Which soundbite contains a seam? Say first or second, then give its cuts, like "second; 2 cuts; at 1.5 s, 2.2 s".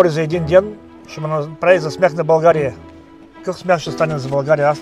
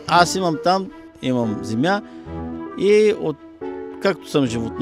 second; 1 cut; at 1.1 s